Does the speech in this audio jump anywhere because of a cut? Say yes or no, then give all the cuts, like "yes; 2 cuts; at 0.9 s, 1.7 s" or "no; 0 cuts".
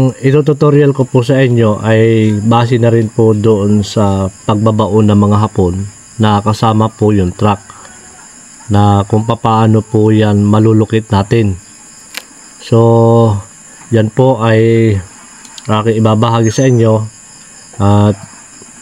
no; 0 cuts